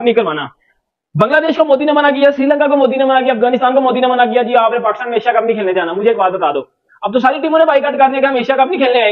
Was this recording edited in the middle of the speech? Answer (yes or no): no